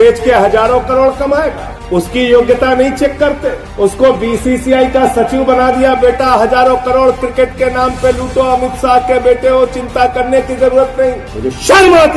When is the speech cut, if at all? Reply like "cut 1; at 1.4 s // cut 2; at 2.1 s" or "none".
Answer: cut 1; at 11.3 s